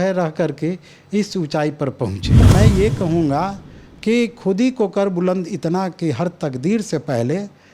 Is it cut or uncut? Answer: cut